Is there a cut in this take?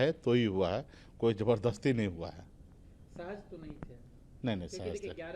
no; 0 cuts

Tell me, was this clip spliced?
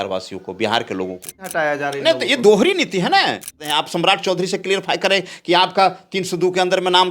yes; 2 cuts; at 1.5 s, 3.6 s

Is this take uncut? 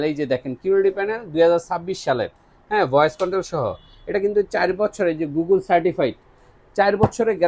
yes; 0 cuts

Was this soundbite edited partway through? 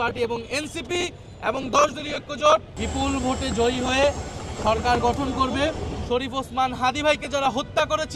yes; 2 cuts; at 2.8 s, 5.9 s

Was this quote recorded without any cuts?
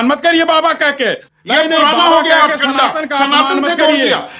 no; 1 cut; at 1.2 s

